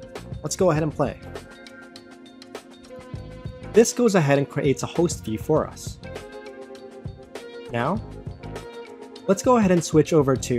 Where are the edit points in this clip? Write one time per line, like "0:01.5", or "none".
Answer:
none